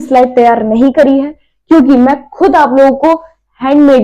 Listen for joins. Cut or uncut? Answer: uncut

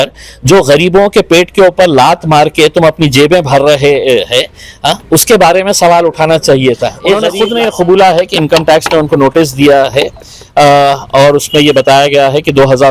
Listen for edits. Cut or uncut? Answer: cut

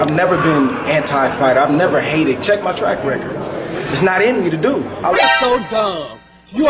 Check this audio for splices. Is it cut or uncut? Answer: cut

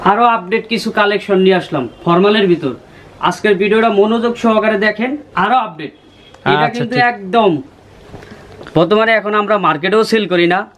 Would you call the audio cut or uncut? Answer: cut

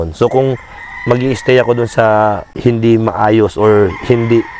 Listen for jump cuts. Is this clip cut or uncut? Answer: cut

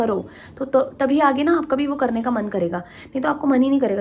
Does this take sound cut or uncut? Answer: uncut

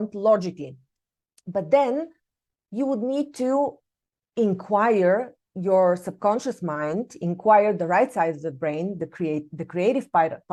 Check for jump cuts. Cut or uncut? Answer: uncut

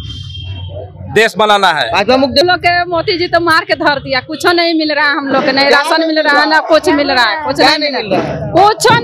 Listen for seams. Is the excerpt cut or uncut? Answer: cut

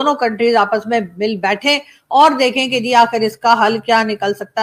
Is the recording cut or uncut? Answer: uncut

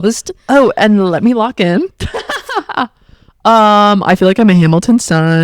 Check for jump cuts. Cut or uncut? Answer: uncut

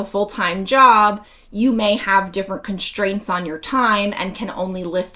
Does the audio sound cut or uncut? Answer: uncut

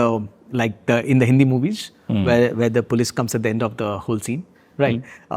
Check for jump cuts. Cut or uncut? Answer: uncut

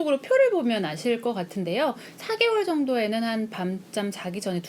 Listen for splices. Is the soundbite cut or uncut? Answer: uncut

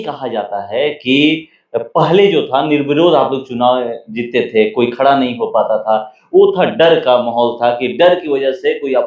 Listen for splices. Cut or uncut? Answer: uncut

